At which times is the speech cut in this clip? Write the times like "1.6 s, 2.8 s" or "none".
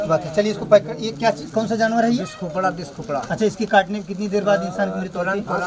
none